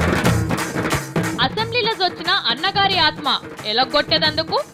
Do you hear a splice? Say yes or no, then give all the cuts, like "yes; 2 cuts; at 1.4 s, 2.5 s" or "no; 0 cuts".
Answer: no; 0 cuts